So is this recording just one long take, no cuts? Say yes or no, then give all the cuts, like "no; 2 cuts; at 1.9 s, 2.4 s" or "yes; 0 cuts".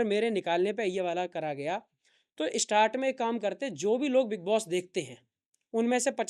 yes; 0 cuts